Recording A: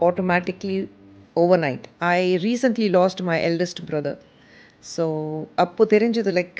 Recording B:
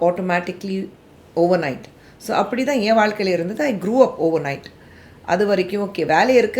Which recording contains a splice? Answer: A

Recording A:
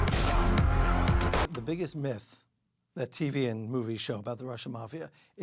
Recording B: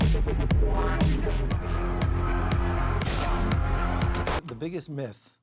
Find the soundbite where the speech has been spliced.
B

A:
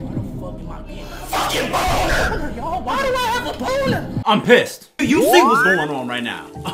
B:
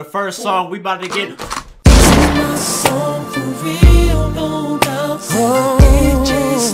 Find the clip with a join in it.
A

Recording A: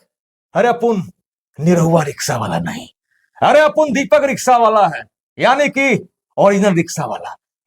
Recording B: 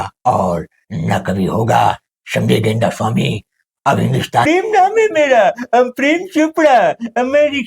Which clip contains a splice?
B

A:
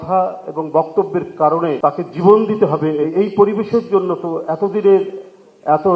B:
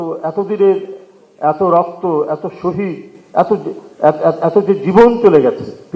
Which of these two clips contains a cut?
A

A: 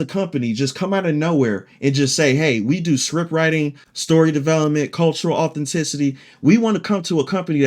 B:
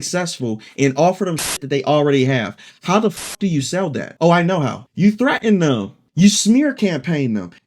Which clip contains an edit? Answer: B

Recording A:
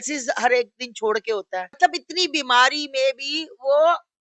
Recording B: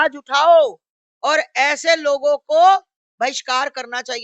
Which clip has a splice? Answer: A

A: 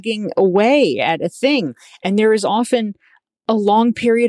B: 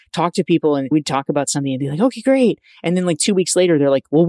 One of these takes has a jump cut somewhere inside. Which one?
B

